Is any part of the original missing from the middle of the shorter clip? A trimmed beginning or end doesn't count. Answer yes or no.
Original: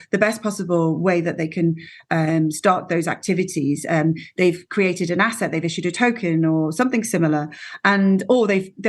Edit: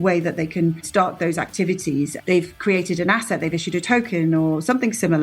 yes